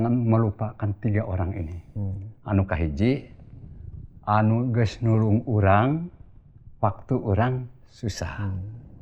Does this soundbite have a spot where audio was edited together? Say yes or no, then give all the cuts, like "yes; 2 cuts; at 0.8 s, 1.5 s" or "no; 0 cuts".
no; 0 cuts